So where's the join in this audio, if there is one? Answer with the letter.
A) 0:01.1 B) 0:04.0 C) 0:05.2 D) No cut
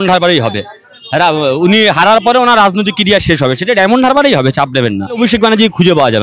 C